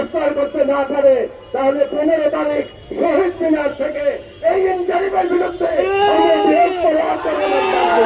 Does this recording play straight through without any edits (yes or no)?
yes